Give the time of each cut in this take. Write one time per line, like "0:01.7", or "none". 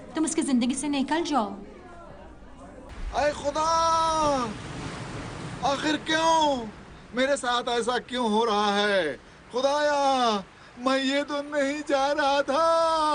0:02.9